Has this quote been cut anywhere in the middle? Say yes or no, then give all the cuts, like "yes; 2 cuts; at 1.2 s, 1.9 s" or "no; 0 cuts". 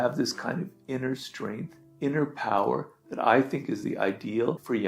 yes; 1 cut; at 1.8 s